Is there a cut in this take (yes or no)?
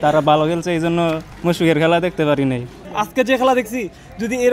yes